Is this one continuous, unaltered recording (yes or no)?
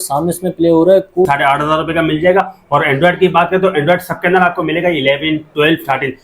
no